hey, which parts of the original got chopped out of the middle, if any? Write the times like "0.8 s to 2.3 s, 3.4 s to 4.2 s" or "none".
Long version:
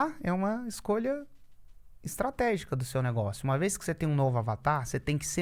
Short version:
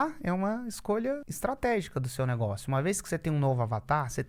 1.3 s to 2.0 s